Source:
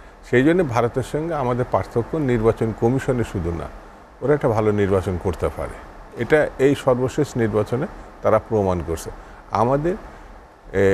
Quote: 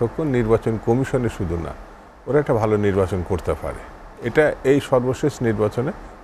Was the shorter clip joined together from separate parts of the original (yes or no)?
no